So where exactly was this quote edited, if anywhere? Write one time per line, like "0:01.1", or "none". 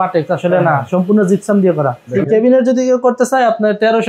0:02.0